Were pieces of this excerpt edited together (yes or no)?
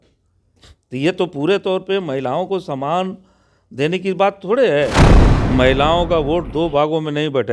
yes